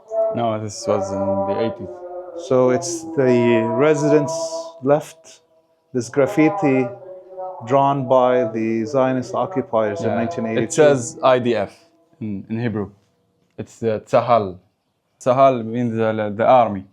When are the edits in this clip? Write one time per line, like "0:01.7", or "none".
0:15.2